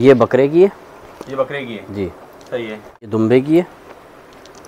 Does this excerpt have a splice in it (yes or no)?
yes